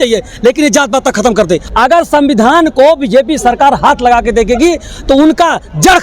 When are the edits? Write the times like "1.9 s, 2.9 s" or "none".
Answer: 1.7 s